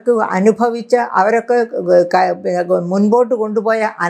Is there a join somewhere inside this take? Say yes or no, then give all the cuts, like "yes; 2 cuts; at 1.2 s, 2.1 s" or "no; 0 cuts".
no; 0 cuts